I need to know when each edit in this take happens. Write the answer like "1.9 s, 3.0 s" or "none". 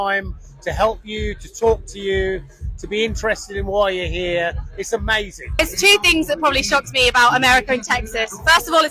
none

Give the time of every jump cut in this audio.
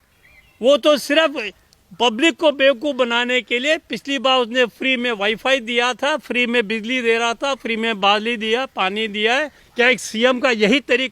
9.6 s

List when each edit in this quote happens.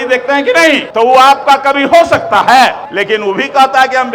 0.9 s, 2.9 s

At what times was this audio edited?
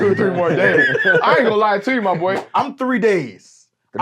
2.5 s

